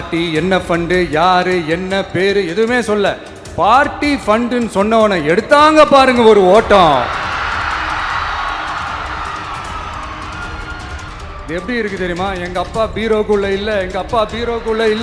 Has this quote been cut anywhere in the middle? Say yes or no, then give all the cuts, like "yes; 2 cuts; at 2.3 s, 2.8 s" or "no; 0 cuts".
yes; 1 cut; at 11.1 s